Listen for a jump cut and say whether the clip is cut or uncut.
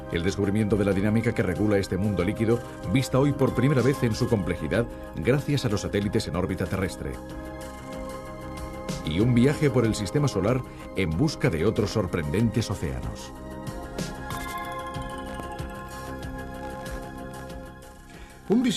uncut